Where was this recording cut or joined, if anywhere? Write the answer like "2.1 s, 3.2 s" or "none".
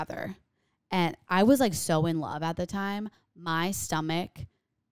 1.2 s